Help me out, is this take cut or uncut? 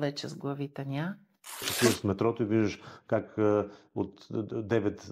cut